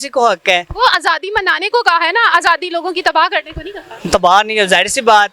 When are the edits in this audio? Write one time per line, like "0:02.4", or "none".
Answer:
none

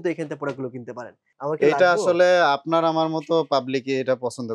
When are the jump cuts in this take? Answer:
0:01.2

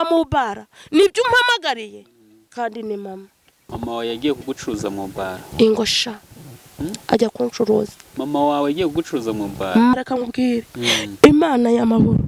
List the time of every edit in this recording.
0:03.7
0:09.9

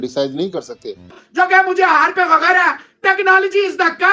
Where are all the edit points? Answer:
0:01.1

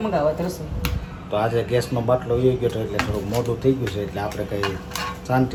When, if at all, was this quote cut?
none

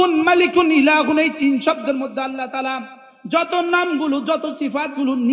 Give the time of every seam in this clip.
none

